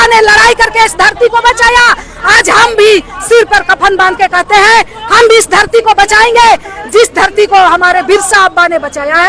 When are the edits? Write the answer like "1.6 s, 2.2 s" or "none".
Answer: none